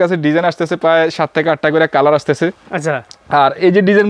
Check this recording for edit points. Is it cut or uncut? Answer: uncut